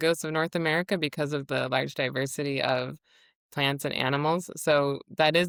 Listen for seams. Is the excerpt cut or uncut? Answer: uncut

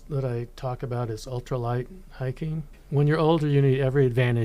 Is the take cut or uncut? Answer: cut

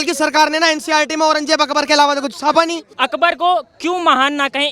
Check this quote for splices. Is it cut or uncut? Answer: cut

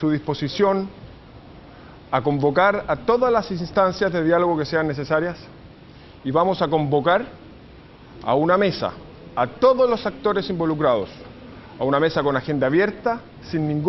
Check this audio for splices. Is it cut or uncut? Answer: cut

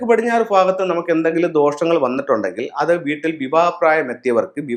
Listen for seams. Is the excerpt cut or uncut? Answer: uncut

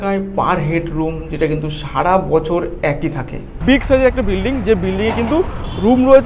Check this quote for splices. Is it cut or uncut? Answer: cut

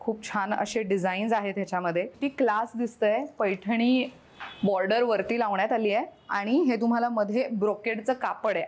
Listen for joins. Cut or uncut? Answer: cut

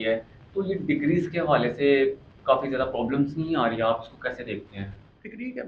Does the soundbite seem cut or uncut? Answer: uncut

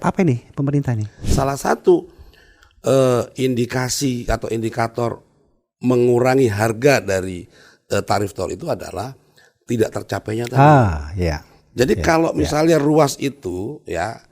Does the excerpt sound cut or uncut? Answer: cut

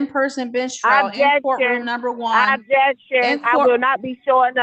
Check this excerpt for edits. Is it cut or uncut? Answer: uncut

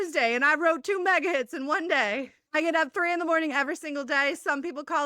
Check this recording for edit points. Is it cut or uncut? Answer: cut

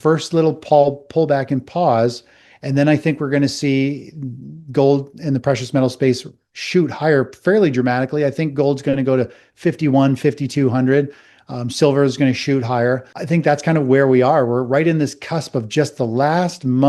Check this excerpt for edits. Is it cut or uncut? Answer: cut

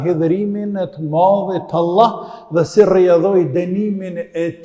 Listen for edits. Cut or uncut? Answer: uncut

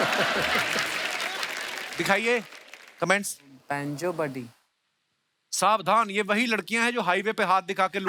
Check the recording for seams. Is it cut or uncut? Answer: uncut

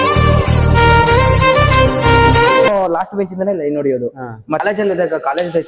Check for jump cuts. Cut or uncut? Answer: cut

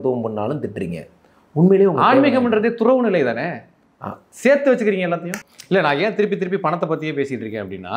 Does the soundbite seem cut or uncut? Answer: cut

